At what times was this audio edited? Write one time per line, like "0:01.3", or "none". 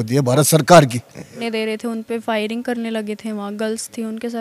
0:01.4